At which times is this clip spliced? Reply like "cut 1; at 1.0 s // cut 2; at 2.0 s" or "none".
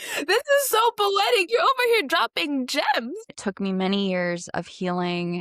cut 1; at 3.4 s